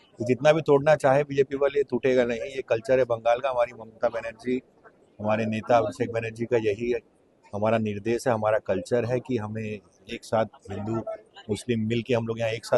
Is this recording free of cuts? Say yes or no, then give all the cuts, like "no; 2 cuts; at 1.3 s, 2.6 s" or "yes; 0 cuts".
yes; 0 cuts